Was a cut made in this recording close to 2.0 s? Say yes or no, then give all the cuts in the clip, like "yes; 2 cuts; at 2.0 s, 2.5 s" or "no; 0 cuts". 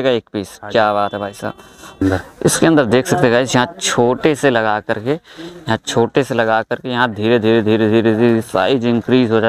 yes; 1 cut; at 2.0 s